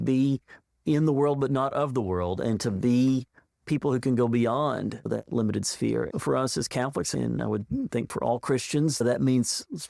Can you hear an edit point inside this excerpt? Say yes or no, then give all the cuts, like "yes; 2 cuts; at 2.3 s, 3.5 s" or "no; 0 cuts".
yes; 2 cuts; at 6.1 s, 8.9 s